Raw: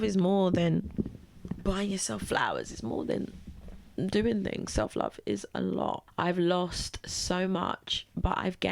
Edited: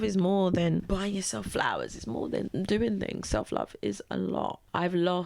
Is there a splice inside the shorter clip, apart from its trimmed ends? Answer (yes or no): yes